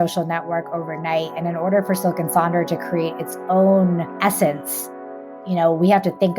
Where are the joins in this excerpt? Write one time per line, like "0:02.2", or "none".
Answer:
0:04.1

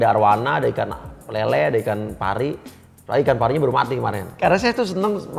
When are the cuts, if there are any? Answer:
0:04.3

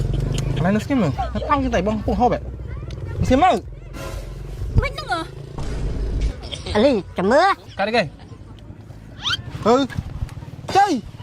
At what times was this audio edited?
0:07.7

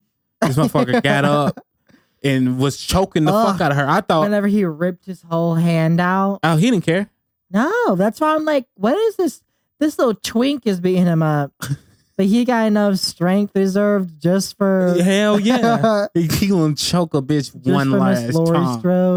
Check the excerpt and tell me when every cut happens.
none

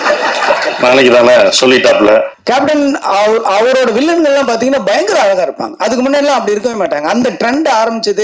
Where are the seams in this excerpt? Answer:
0:02.4

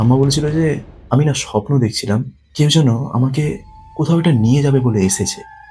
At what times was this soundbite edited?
0:00.9
0:02.4

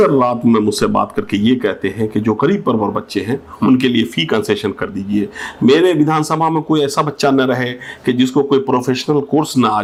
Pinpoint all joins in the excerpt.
none

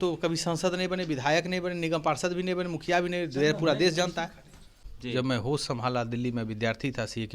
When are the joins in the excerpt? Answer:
0:04.7

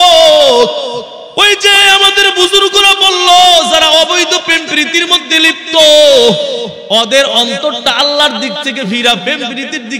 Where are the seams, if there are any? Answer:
0:01.2
0:06.7

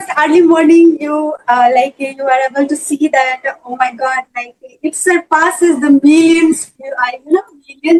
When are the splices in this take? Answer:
none

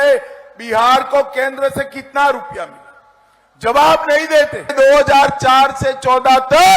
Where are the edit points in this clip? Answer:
0:04.7

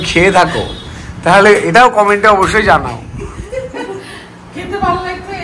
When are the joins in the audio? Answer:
none

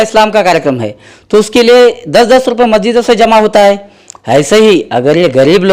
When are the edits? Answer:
none

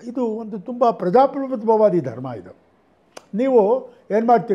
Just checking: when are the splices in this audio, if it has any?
none

